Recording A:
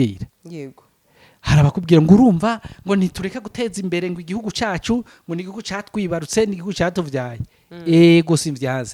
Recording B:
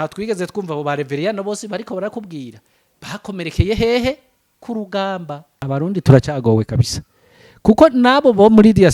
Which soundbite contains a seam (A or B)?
B